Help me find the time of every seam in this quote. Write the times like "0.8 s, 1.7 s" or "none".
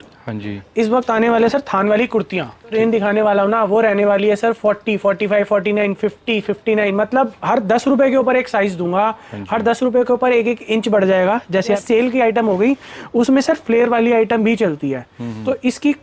2.7 s, 11.8 s